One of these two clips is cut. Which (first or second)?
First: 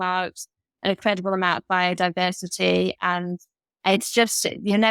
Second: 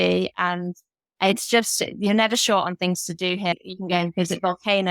second